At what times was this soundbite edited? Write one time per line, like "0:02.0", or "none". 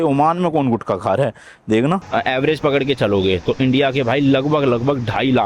0:02.0